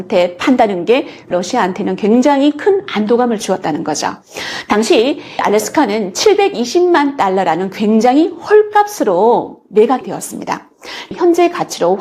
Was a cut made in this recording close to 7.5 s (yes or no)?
no